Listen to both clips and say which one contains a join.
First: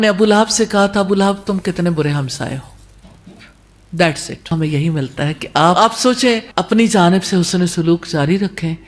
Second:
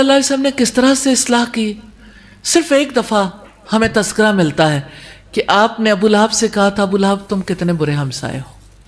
first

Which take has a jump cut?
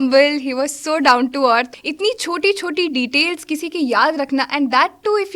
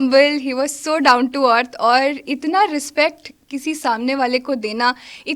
first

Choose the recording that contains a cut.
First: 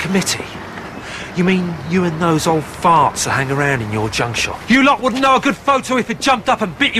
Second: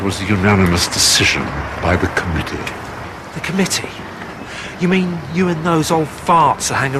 first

